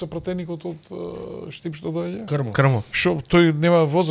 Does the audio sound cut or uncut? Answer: uncut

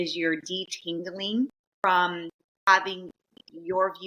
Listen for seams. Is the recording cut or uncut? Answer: cut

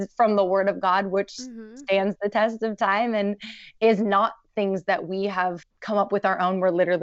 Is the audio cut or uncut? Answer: cut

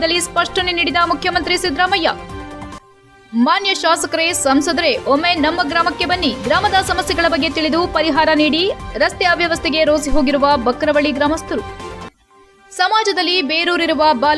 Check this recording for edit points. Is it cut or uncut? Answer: uncut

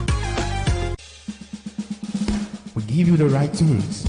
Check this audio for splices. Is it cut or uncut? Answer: cut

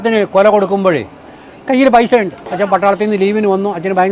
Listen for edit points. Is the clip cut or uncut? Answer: cut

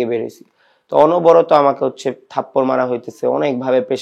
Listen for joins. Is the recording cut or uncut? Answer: uncut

